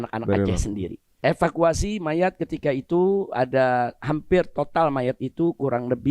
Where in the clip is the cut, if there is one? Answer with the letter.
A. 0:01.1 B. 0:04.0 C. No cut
A